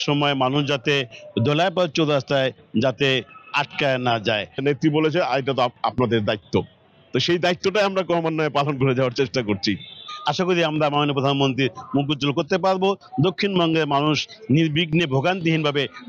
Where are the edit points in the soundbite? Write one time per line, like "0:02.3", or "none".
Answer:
0:04.6
0:10.0

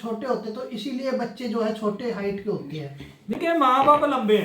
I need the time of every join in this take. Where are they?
0:03.4

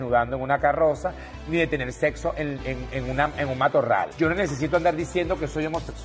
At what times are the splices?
0:04.1

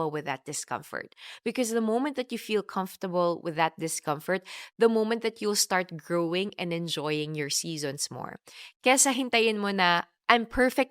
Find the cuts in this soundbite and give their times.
none

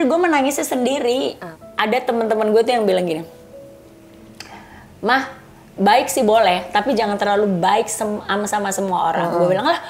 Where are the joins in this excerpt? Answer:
0:01.4

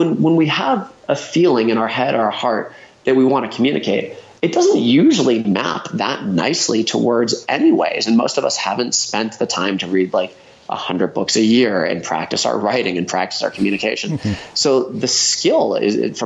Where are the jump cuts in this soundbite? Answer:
none

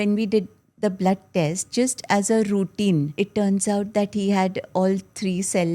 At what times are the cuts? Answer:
0:03.1

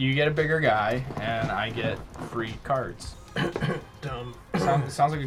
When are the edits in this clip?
none

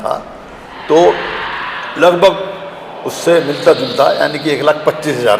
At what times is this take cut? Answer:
none

